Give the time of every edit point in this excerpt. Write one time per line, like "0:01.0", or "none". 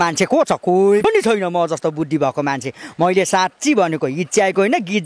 0:01.0